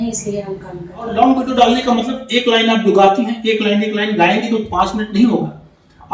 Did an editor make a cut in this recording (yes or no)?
yes